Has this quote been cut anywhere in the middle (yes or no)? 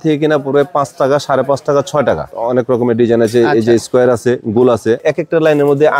yes